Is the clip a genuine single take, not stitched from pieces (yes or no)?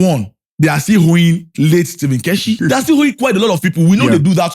no